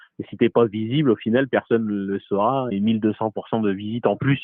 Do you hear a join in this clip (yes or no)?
yes